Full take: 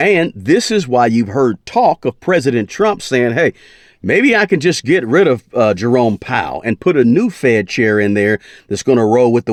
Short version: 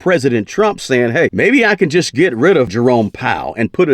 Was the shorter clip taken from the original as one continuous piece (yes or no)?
no